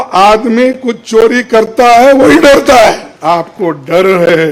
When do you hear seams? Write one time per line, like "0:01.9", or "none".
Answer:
0:03.1